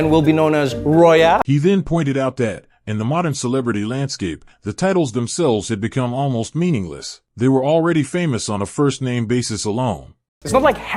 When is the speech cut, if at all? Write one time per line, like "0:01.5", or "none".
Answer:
none

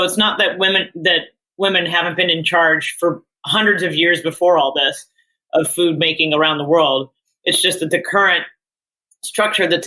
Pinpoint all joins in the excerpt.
0:01.4

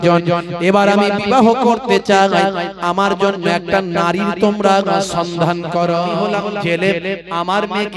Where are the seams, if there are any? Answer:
0:06.2

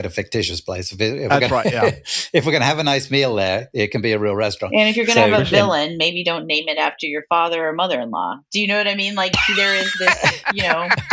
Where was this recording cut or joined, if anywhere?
none

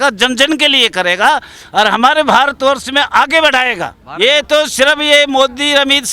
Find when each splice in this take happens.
0:04.0

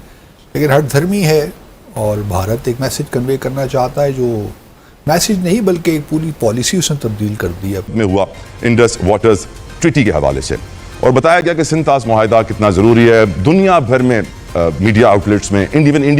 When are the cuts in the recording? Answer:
0:07.8

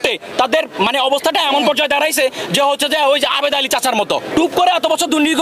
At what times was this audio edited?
0:04.3

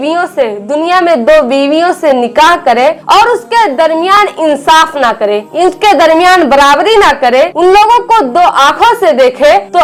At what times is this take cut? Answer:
none

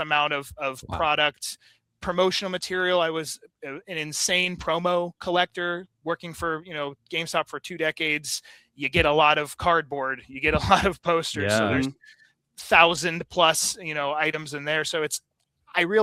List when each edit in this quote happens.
none

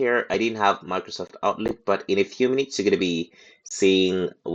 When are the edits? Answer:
none

